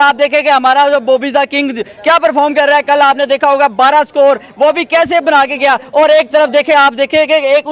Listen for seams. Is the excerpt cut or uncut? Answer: uncut